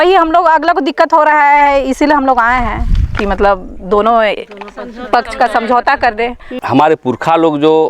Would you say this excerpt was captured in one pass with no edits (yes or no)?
no